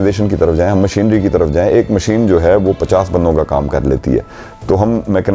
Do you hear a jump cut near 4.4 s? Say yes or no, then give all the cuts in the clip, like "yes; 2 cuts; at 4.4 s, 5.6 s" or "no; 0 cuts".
no; 0 cuts